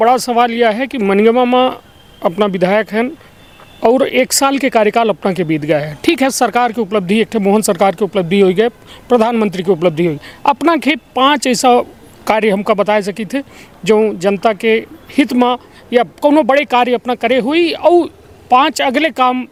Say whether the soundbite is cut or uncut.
uncut